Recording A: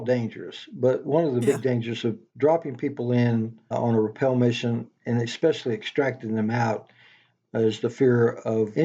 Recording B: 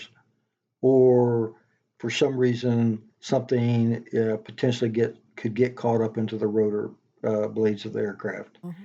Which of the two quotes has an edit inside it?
A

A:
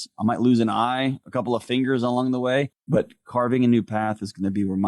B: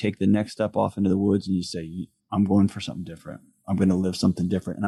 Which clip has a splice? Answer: A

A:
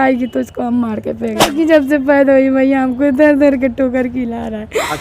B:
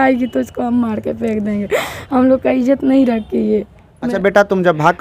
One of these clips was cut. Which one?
A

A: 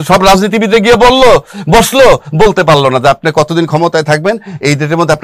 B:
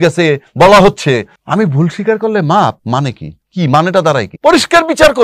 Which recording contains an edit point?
B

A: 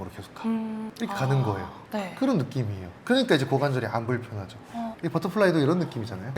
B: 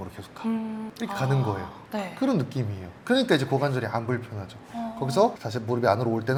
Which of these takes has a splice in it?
A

